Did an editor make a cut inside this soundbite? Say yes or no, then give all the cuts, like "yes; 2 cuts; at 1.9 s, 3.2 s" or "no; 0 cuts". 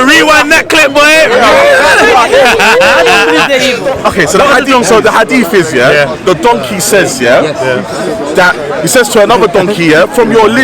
yes; 1 cut; at 3.9 s